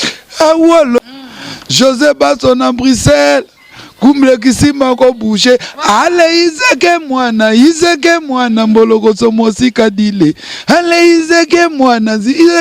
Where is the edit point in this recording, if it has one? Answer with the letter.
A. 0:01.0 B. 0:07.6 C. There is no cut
A